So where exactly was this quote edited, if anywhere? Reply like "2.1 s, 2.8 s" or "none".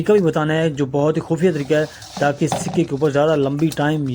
none